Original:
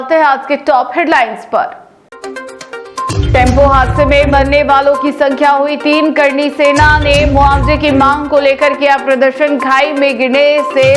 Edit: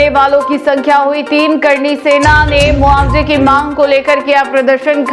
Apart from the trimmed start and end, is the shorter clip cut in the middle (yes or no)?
no